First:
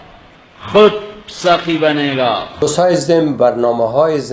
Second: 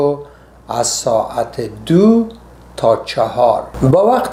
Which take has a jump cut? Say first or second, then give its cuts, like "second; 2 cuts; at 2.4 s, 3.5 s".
first; 1 cut; at 2.5 s